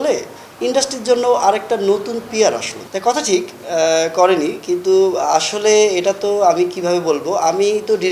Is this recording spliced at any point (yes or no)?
yes